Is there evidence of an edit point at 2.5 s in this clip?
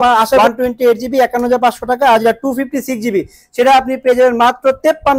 no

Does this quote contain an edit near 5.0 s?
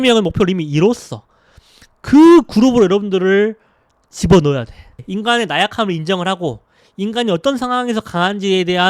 yes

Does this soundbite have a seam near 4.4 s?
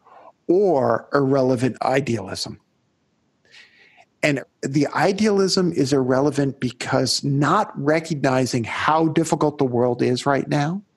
yes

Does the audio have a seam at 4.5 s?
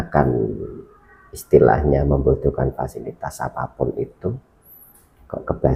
no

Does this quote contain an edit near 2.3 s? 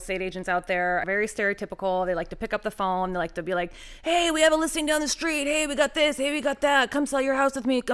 no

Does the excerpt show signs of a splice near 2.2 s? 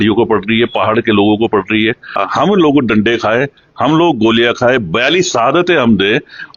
yes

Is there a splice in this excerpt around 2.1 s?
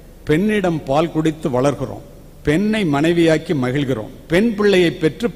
no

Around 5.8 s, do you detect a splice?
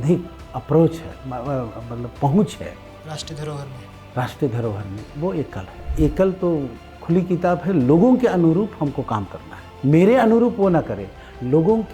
yes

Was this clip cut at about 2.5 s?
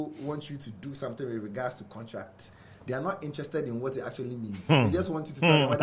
no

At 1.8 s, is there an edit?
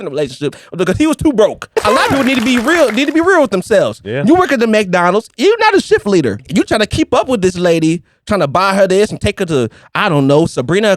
yes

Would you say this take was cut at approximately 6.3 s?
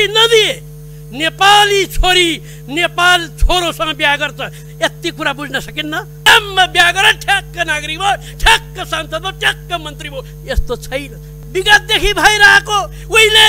yes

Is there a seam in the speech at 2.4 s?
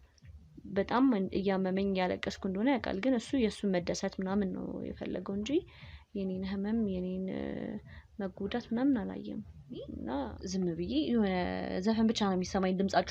no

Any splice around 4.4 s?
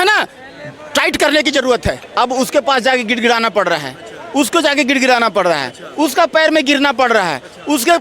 no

